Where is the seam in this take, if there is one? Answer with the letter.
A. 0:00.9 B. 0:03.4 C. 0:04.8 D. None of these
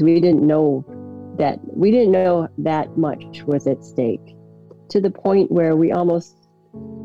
D